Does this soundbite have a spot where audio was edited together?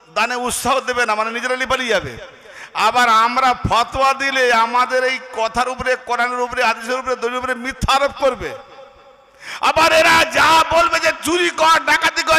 no; 0 cuts

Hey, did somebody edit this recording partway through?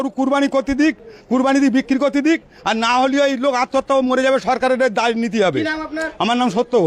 no; 0 cuts

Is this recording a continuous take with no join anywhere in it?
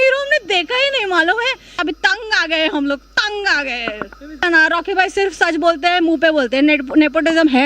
no; 2 cuts; at 1.8 s, 4.4 s

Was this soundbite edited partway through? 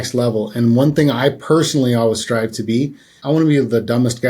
yes; 1 cut; at 3.2 s

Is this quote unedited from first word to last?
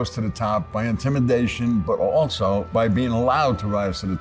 no; 1 cut; at 2.7 s

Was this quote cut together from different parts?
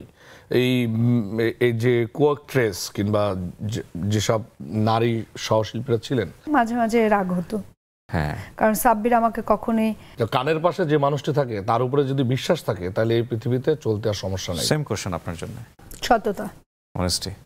yes; 2 cuts; at 6.5 s, 10.0 s

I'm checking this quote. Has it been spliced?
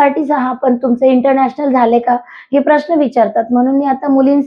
no; 0 cuts

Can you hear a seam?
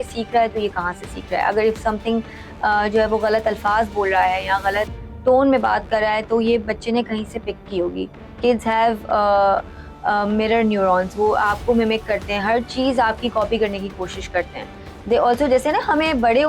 no; 0 cuts

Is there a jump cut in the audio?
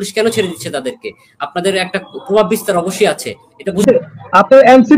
yes; 1 cut; at 3.8 s

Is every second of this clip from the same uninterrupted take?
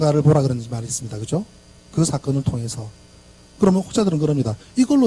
no; 1 cut; at 2.6 s

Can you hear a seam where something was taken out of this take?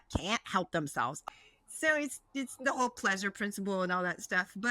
yes; 1 cut; at 1.2 s

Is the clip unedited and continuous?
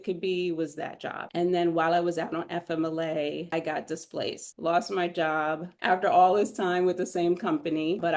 no; 4 cuts; at 1.3 s, 3.5 s, 4.5 s, 5.7 s

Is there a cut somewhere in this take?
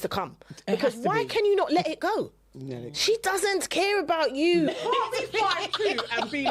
yes; 1 cut; at 4.7 s

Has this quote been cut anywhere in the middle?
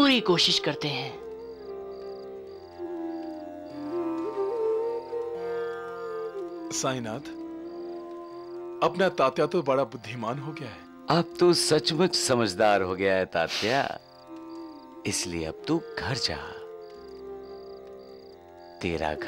no; 0 cuts

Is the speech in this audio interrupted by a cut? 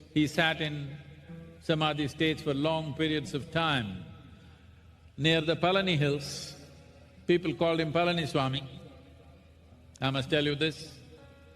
yes; 2 cuts; at 4.2 s, 7.9 s

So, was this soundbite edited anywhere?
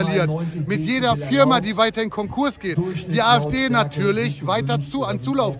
no; 0 cuts

